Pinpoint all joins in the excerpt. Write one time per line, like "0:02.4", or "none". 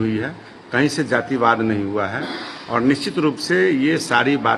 none